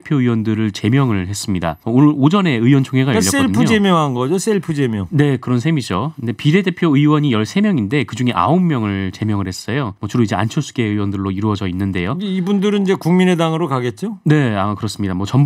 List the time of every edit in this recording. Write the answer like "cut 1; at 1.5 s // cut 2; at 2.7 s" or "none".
cut 1; at 1.8 s // cut 2; at 10.0 s